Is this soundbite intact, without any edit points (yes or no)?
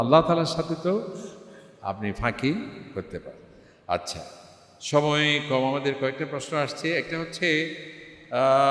yes